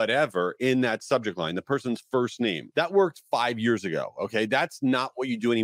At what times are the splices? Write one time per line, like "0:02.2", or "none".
0:02.6